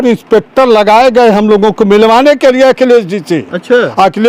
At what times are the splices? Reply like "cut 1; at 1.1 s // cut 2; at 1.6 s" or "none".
none